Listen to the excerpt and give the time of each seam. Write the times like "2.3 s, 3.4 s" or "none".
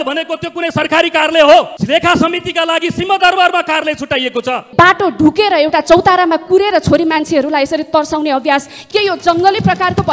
1.8 s, 4.6 s, 8.8 s